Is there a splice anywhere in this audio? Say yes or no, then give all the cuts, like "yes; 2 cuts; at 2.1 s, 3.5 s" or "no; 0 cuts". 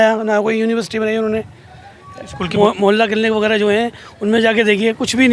yes; 1 cut; at 2.5 s